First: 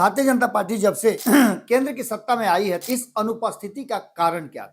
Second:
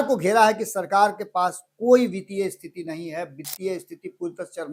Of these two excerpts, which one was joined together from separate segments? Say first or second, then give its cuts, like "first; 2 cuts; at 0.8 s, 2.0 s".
first; 2 cuts; at 1.2 s, 2.8 s